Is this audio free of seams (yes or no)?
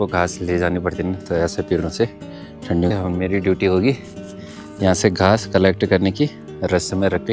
no